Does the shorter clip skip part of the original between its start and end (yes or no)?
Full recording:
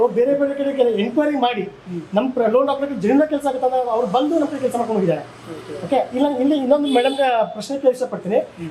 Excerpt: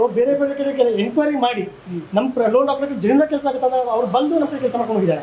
no